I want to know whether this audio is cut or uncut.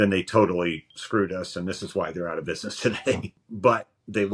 cut